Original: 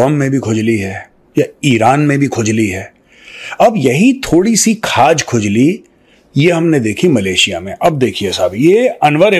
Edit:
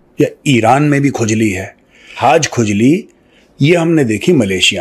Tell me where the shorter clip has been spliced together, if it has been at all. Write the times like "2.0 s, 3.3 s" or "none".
2.1 s